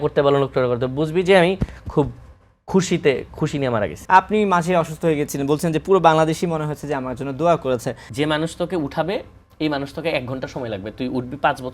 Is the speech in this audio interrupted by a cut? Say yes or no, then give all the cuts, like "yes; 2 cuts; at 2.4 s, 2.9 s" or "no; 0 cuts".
yes; 2 cuts; at 4.0 s, 8.0 s